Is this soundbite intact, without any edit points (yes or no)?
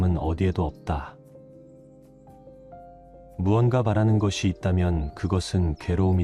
no